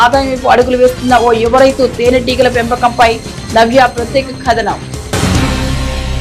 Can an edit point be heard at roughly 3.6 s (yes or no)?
no